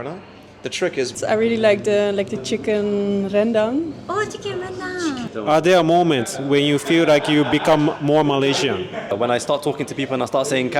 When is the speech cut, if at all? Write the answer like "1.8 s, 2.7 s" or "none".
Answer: 1.1 s, 5.3 s, 9.1 s